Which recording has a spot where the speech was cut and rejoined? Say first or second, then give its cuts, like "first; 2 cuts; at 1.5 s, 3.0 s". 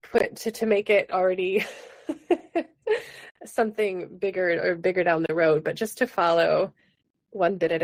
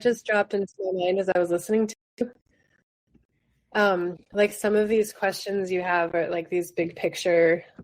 second; 1 cut; at 4.2 s